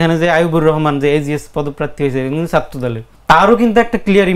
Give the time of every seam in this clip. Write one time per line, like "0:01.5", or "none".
0:03.1